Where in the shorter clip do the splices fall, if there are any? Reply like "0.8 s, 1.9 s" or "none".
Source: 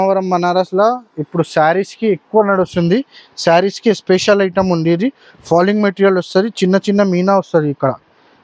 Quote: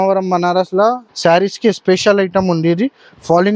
1.1 s